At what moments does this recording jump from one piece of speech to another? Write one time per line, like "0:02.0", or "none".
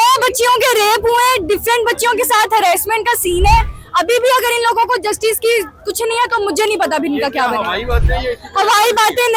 none

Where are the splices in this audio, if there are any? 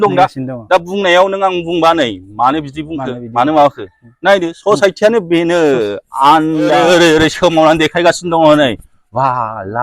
0:06.8

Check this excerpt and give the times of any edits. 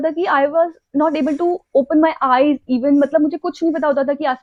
none

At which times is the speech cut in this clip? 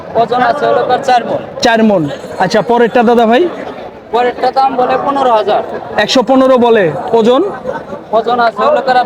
none

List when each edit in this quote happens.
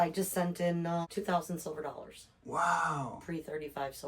0:01.1

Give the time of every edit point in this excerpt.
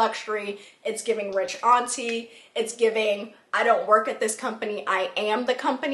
none

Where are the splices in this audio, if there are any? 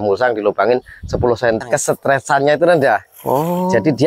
0:01.6

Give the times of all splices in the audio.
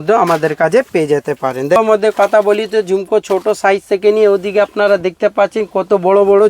0:01.8

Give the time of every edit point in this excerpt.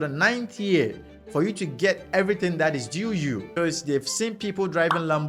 0:03.5

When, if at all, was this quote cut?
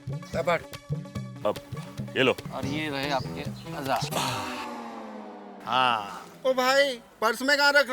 0:02.5

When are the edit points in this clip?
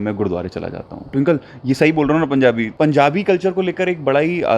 0:01.1
0:02.7

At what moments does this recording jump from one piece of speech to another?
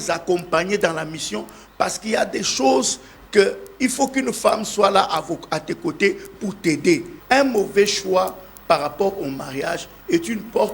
0:07.1

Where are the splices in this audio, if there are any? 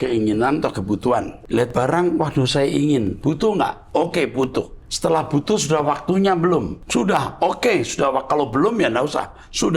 0:01.4
0:04.8
0:06.8

